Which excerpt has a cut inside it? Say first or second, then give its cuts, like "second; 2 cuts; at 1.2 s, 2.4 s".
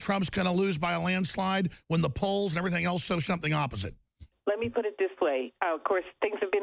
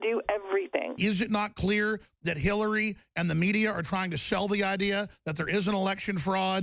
second; 1 cut; at 0.9 s